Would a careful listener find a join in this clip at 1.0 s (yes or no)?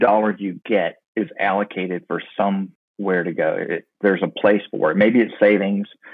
yes